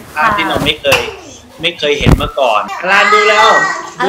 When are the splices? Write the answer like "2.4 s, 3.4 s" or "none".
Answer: 2.7 s